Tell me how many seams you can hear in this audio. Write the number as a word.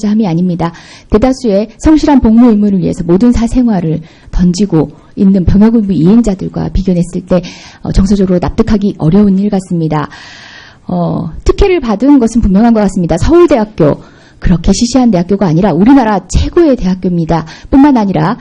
one